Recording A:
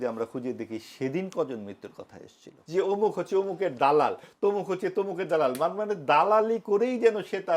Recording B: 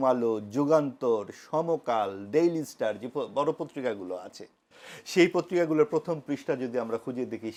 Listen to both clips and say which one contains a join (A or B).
A